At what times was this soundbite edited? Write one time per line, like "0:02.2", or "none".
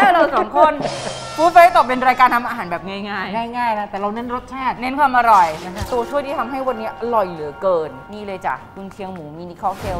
0:05.9
0:08.0